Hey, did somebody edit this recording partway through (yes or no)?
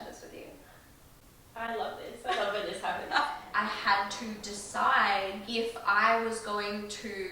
yes